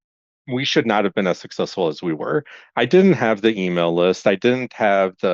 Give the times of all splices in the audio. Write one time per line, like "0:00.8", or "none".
none